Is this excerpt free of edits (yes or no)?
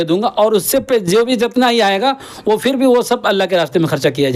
yes